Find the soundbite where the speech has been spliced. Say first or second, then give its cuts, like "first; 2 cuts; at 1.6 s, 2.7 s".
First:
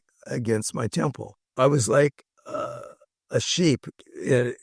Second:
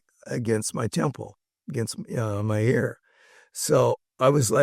first; 1 cut; at 1.4 s